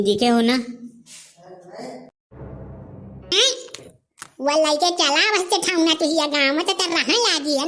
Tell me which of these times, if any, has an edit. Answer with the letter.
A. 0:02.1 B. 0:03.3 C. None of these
B